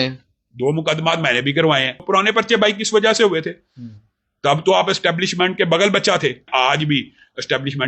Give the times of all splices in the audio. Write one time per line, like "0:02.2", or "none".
0:02.0
0:06.5